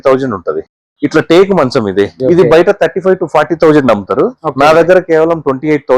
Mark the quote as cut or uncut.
cut